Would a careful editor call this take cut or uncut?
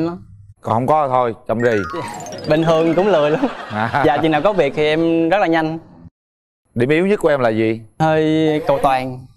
uncut